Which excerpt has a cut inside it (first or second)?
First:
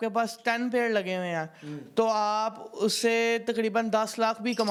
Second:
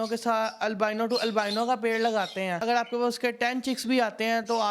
second